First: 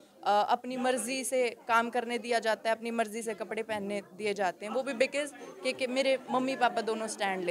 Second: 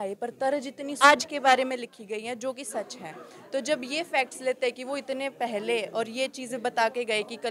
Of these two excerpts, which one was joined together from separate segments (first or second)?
second